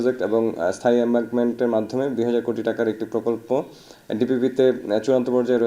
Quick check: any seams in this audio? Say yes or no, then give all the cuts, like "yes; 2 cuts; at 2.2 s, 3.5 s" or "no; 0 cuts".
no; 0 cuts